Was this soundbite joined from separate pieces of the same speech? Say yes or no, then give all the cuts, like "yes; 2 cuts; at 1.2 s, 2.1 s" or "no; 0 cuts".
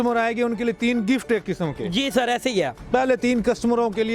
yes; 1 cut; at 2.8 s